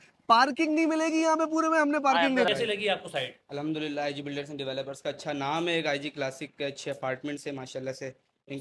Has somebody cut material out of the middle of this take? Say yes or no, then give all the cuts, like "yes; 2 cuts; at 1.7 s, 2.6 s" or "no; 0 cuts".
yes; 1 cut; at 2.5 s